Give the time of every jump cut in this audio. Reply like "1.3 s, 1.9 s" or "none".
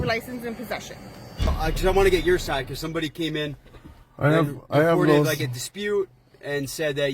1.5 s